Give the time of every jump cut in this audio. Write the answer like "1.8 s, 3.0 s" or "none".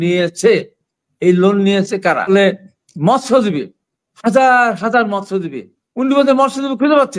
2.3 s